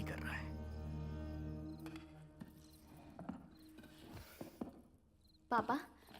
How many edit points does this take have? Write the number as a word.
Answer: one